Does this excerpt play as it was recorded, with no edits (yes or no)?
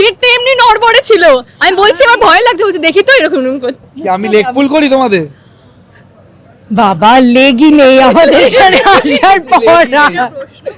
no